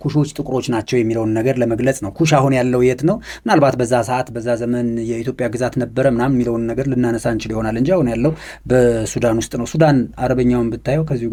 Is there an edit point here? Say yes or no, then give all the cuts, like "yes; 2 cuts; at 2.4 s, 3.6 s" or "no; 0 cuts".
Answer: no; 0 cuts